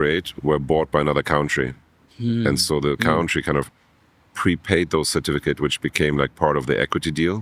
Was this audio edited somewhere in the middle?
no; 0 cuts

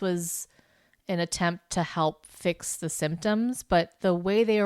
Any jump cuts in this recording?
no; 0 cuts

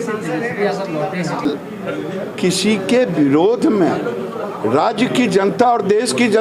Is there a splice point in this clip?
yes; 1 cut; at 1.4 s

